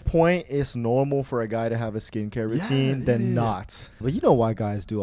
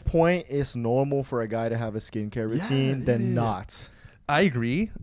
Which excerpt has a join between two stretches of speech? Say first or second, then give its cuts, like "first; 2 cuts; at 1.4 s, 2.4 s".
first; 1 cut; at 4.0 s